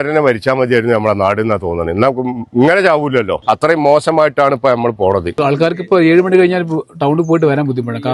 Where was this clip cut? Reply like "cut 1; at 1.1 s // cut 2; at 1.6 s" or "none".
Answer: cut 1; at 3.4 s // cut 2; at 5.4 s